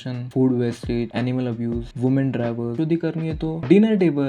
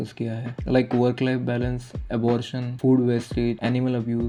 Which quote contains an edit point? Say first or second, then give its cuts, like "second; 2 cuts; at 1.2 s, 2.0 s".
first; 1 cut; at 2.7 s